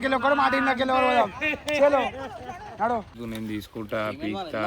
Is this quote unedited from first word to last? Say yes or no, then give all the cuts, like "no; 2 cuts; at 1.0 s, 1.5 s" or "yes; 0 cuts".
no; 1 cut; at 3.2 s